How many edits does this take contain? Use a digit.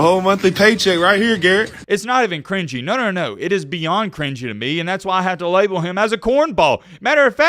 1